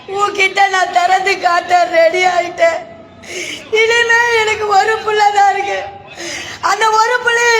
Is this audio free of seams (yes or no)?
yes